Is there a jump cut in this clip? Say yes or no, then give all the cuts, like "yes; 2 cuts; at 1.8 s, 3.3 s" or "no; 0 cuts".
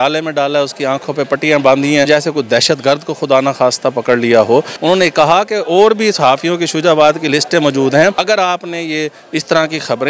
yes; 3 cuts; at 2.1 s, 4.7 s, 8.2 s